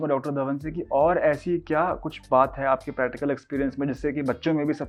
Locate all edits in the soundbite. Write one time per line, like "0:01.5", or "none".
none